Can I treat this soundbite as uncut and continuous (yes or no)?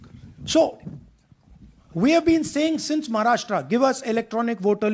yes